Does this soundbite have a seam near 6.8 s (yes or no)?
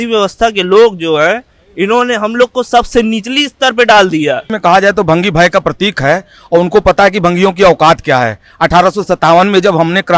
no